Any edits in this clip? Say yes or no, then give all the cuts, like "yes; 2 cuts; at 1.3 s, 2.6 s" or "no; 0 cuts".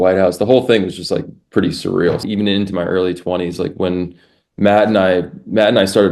yes; 1 cut; at 2.2 s